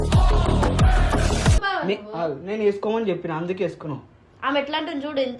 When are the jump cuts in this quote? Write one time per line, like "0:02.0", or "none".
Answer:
0:01.6